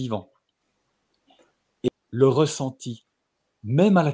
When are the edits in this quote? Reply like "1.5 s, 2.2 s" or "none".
1.9 s